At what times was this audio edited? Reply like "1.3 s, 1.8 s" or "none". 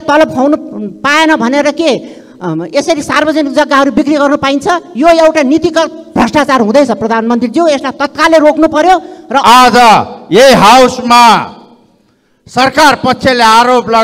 9.4 s